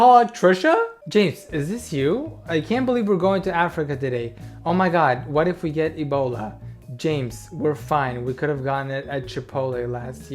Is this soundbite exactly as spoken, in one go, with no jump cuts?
no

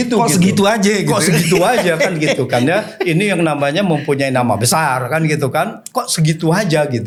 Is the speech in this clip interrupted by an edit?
no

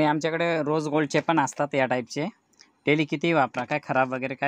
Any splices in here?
no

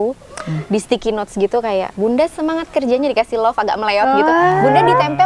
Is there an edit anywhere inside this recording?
no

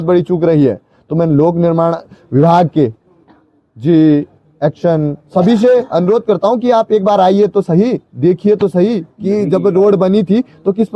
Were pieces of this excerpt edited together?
no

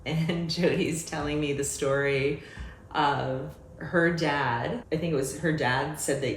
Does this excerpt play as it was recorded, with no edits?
no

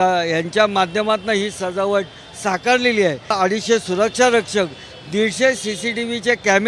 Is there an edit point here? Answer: yes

